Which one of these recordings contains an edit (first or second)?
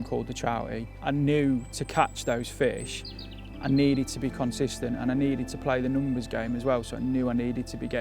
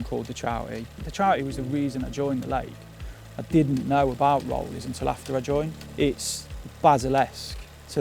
second